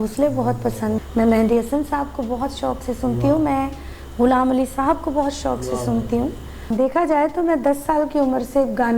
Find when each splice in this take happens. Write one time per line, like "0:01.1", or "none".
0:01.0
0:06.7